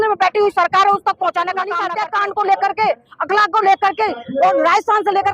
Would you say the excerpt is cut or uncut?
cut